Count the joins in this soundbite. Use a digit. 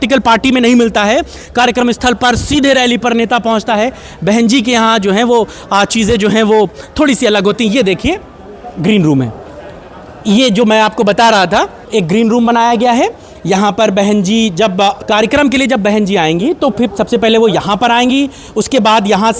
0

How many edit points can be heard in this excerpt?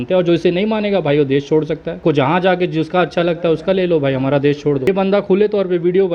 2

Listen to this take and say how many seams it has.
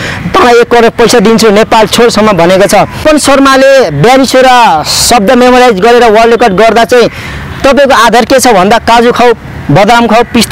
1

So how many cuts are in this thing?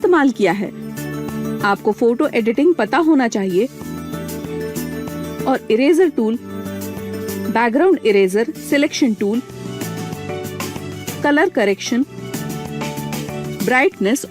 1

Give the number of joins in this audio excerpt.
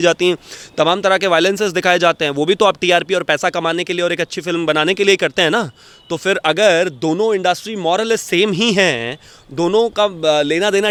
0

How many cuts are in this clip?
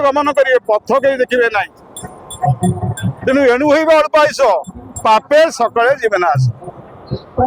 0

